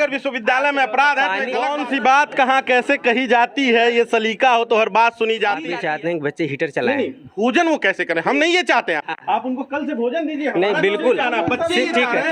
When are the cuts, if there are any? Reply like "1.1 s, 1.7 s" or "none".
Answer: 1.7 s, 5.7 s